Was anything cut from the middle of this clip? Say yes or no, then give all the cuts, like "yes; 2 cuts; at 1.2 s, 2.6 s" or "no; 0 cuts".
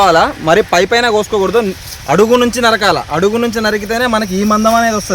no; 0 cuts